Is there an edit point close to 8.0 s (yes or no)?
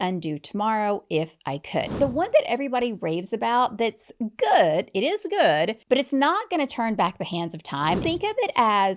yes